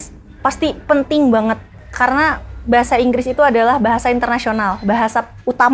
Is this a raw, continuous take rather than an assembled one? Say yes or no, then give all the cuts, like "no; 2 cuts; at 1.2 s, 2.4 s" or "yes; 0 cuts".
yes; 0 cuts